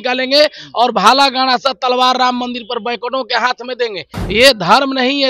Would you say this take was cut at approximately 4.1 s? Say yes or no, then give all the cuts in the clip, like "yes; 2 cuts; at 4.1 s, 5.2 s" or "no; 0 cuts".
yes; 1 cut; at 4.1 s